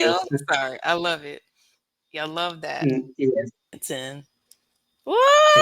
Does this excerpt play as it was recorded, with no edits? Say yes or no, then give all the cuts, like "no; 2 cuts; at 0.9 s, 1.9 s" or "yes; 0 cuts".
no; 1 cut; at 3.8 s